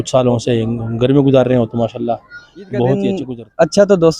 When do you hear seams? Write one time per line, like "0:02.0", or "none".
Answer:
0:03.2